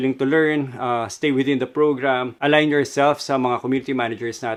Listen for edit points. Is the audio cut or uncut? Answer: uncut